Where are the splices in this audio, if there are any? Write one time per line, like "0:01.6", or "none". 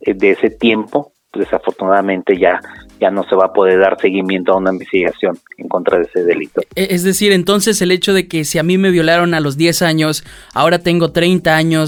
none